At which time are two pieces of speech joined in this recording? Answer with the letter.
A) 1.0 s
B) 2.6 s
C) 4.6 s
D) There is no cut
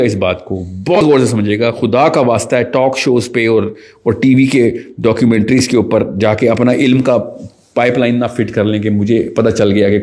A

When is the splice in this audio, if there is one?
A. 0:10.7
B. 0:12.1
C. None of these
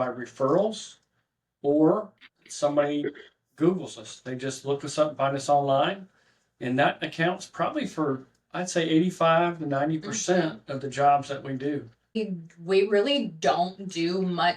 B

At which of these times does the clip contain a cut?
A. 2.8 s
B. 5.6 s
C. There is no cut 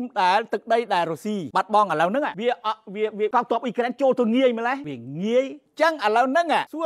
B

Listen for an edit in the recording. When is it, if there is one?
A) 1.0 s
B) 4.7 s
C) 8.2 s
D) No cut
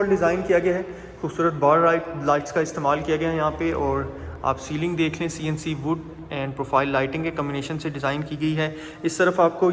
D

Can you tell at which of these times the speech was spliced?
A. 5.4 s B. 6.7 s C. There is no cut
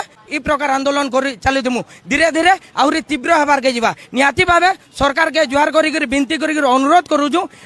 C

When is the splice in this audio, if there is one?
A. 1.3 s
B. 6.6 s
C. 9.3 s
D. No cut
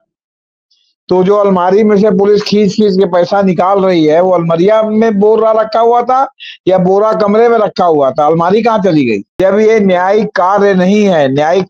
C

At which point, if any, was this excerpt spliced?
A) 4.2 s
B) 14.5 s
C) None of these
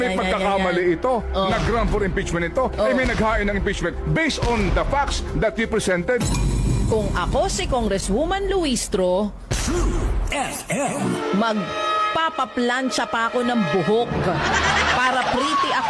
C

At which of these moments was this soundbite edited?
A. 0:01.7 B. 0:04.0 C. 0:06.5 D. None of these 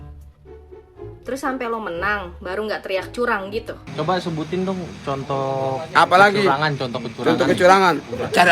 B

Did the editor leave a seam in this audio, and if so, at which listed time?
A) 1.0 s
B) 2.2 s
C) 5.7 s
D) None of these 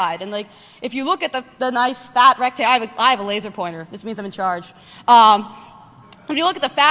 A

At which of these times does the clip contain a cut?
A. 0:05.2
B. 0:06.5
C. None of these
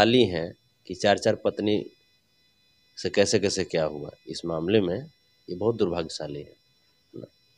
C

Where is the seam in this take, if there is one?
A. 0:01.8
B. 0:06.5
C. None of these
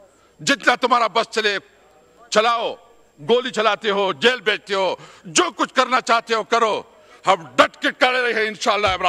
C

